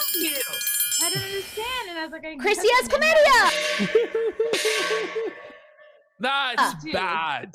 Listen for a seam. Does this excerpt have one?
no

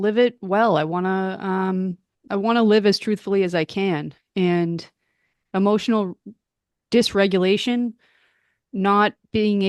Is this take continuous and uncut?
no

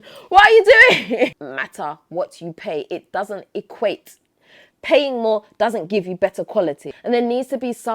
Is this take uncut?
no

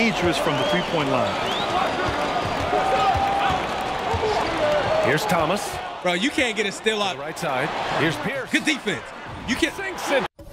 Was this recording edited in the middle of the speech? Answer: no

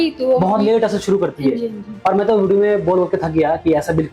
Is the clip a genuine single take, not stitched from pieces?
yes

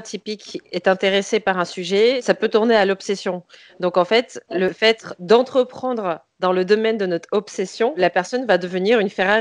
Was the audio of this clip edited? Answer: yes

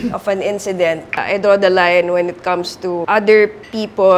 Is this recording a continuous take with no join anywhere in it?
no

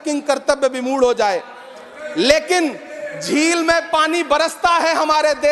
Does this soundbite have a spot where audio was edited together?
no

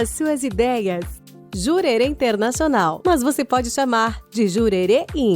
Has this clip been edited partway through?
yes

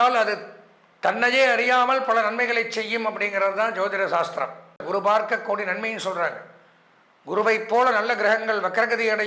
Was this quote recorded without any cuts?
no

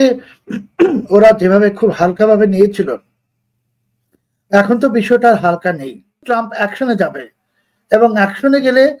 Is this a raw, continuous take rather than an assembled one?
no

